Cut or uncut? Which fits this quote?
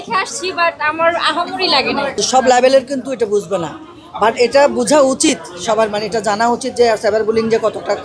cut